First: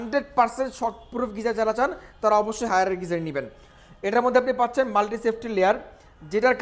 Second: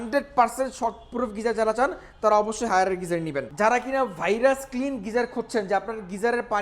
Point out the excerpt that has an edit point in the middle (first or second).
second